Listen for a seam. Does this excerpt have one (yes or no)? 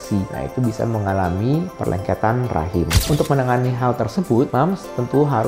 yes